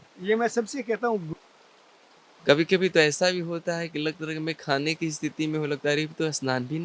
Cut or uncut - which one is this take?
cut